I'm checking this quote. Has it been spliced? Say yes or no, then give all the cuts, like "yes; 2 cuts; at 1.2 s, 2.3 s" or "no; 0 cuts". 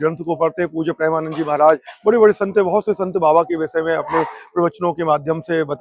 no; 0 cuts